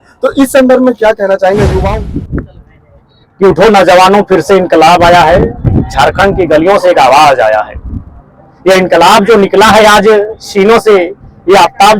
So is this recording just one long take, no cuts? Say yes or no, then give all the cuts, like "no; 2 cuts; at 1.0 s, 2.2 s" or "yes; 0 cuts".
no; 1 cut; at 1.8 s